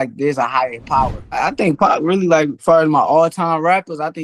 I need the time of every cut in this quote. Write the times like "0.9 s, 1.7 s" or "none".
1.4 s, 2.6 s

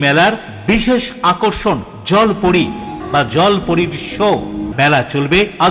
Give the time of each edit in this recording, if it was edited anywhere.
3.0 s, 4.7 s

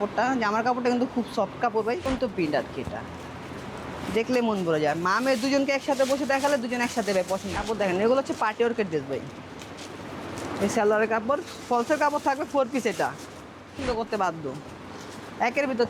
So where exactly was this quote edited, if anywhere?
2.1 s, 7.5 s, 13.8 s

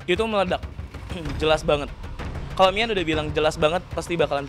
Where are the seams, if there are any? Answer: 1.2 s

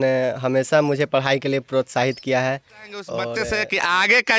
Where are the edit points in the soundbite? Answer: 3.3 s

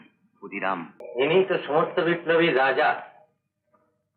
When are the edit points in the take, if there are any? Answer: 1.0 s

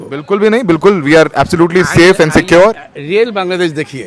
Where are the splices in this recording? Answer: none

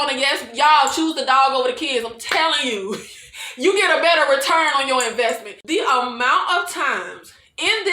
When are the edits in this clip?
5.5 s

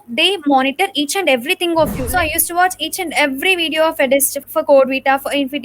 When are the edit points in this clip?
2.0 s, 4.4 s

